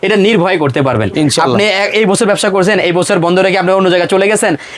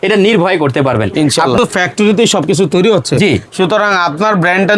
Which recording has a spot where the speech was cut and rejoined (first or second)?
second